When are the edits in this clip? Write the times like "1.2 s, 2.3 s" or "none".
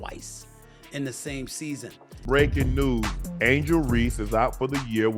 2.1 s